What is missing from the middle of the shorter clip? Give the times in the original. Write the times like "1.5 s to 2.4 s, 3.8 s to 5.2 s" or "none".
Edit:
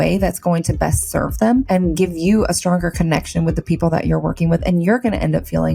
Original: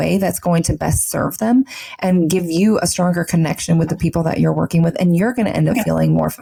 1.7 s to 2.0 s